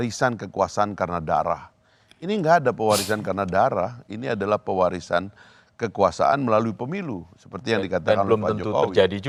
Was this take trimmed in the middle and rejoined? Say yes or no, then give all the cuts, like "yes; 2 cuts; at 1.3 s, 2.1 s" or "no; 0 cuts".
no; 0 cuts